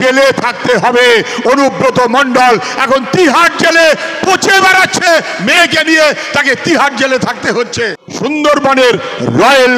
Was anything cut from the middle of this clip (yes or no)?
yes